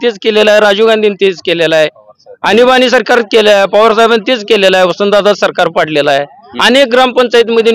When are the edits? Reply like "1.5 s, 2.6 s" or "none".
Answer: none